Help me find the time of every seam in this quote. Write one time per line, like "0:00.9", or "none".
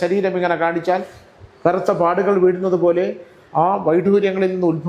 none